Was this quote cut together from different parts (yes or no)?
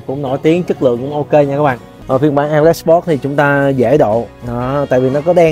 yes